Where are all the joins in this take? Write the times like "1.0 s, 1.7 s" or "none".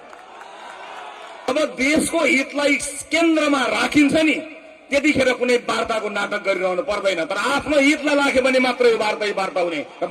1.5 s